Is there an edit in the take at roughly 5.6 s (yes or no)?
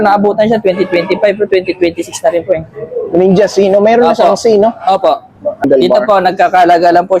yes